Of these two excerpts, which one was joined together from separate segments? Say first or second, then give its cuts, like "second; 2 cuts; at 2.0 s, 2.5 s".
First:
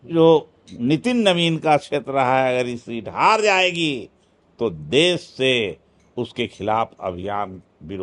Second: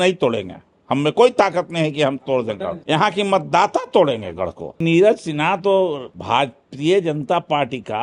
second; 2 cuts; at 4.8 s, 6.1 s